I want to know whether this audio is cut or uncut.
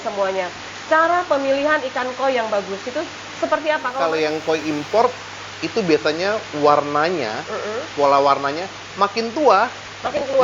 cut